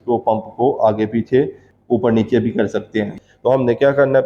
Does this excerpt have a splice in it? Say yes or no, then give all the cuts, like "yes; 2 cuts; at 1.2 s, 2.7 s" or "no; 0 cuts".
yes; 2 cuts; at 1.7 s, 3.1 s